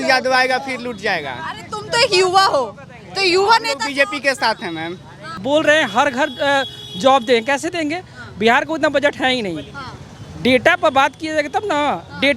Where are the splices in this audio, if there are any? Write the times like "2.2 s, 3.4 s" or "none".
5.3 s

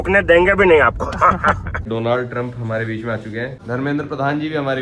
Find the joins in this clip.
1.8 s, 3.6 s

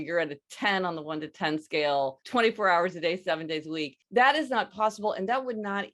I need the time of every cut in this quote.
2.2 s, 3.9 s

